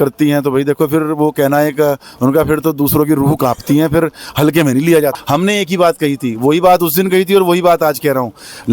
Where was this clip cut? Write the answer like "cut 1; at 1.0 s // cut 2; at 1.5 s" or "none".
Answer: cut 1; at 5.2 s